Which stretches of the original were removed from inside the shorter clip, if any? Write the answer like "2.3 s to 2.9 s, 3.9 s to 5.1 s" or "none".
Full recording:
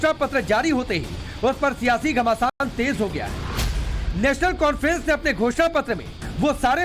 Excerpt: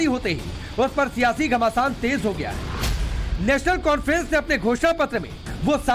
2.5 s to 2.6 s